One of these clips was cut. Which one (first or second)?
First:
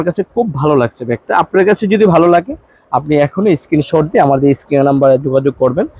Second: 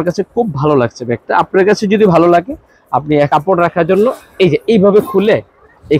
second